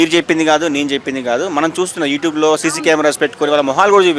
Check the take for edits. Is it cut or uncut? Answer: uncut